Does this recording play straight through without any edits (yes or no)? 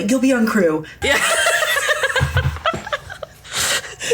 no